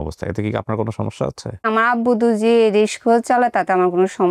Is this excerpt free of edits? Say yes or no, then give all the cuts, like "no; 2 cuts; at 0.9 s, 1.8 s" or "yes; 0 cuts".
no; 1 cut; at 1.7 s